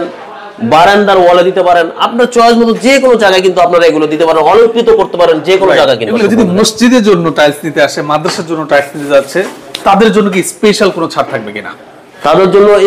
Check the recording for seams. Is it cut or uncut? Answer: cut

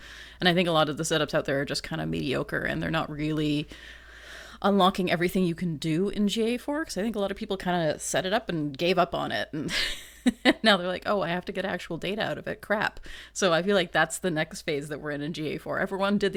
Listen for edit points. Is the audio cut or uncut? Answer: uncut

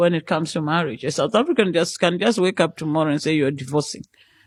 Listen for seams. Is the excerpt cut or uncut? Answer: uncut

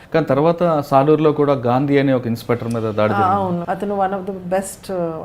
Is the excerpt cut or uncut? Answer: cut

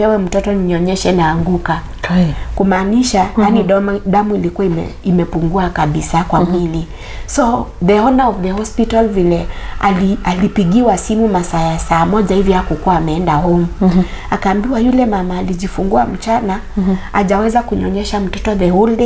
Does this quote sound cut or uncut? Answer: uncut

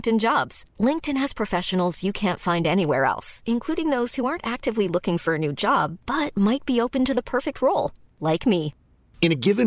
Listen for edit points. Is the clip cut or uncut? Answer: uncut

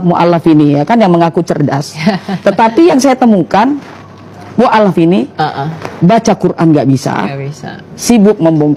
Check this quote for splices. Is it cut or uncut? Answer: uncut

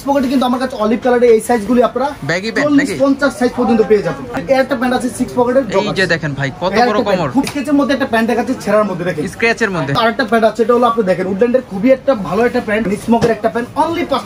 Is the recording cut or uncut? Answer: cut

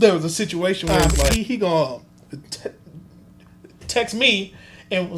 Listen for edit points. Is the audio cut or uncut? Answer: cut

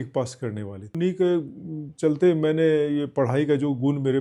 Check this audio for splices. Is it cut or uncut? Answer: cut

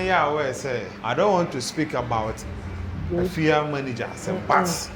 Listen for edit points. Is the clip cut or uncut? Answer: cut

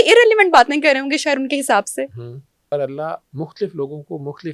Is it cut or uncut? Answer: cut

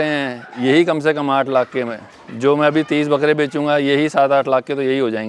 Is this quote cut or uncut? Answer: uncut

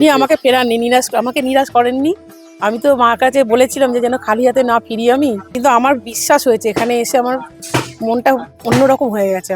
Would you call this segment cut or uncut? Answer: cut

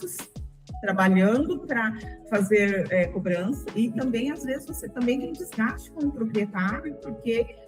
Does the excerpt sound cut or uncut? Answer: cut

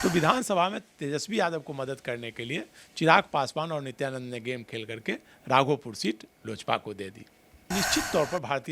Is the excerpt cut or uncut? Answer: cut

